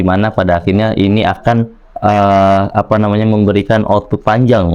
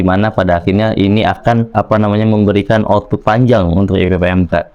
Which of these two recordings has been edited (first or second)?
second